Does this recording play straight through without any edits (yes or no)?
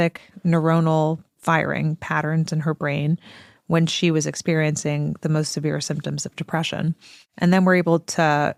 yes